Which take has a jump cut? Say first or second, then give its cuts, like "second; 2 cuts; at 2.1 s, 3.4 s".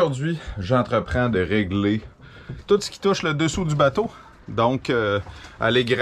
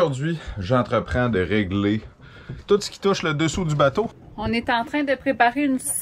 second; 1 cut; at 4.2 s